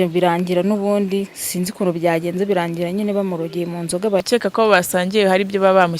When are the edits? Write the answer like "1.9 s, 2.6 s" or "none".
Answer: 4.2 s